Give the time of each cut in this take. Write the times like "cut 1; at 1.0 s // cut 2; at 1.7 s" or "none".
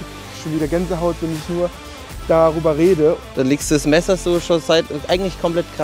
cut 1; at 3.2 s